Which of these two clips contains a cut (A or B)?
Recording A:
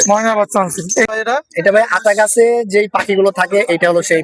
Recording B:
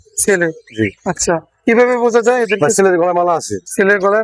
A